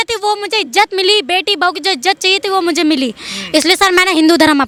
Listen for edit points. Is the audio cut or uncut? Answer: uncut